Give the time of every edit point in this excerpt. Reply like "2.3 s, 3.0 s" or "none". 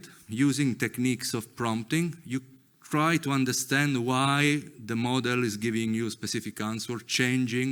none